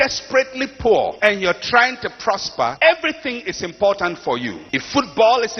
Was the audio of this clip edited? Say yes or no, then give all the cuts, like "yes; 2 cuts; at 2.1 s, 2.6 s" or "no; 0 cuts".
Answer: yes; 3 cuts; at 1.1 s, 2.7 s, 4.6 s